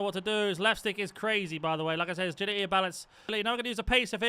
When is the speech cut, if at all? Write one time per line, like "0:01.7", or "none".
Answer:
0:03.3